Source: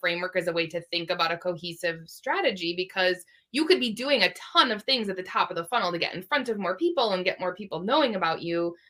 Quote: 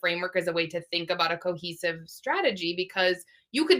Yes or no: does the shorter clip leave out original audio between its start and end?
no